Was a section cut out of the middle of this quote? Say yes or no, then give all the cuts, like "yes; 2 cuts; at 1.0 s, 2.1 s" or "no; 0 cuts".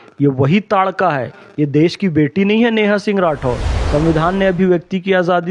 yes; 1 cut; at 3.7 s